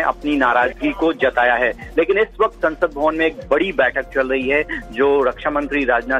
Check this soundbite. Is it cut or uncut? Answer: uncut